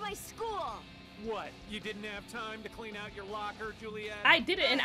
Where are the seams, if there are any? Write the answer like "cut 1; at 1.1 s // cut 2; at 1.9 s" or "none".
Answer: none